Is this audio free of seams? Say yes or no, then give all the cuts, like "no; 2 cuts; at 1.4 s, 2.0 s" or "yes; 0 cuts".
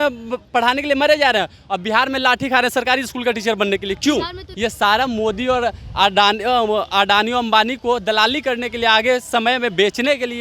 no; 1 cut; at 4.4 s